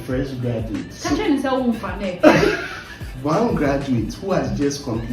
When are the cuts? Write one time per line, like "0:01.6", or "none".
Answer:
0:00.9
0:03.0